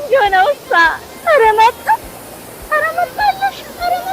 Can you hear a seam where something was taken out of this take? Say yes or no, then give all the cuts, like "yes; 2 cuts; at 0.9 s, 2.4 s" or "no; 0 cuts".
yes; 1 cut; at 1.1 s